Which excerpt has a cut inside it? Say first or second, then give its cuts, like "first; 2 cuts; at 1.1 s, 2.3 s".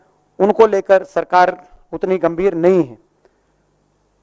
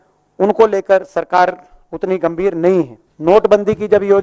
second; 1 cut; at 3.0 s